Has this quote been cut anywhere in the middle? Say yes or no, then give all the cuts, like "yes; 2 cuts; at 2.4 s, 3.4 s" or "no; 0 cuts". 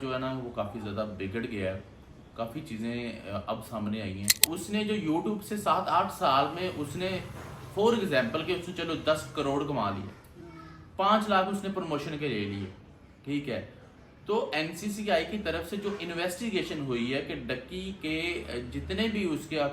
yes; 1 cut; at 4.4 s